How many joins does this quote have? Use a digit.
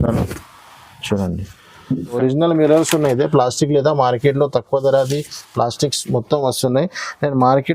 1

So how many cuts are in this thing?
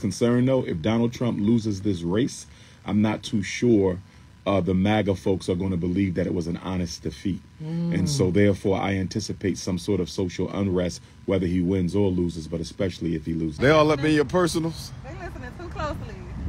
1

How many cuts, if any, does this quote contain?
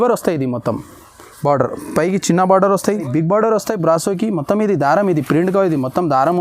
1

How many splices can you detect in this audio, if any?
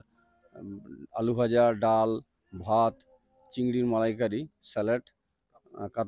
0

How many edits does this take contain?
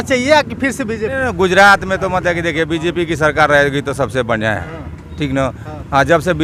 0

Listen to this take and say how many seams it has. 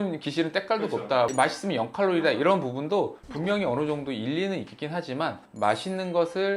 1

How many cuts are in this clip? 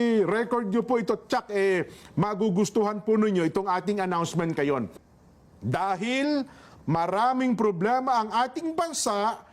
1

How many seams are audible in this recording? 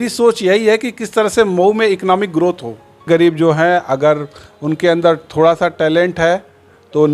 1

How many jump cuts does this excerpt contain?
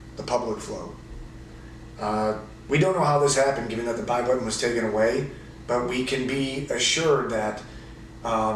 1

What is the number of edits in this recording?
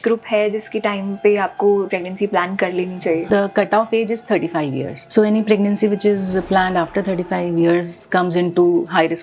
3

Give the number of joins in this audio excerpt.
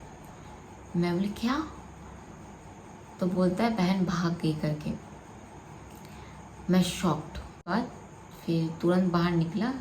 1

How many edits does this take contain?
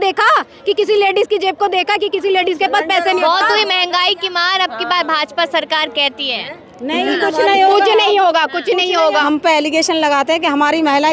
1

